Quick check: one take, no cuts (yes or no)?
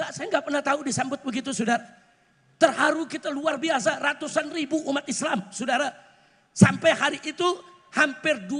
yes